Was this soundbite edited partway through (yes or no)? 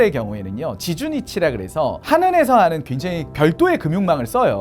yes